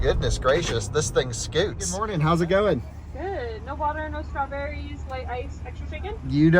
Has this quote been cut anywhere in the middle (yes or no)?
yes